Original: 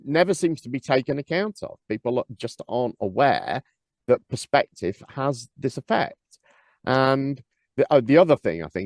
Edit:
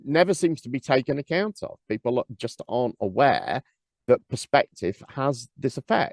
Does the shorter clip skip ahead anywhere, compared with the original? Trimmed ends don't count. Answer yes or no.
no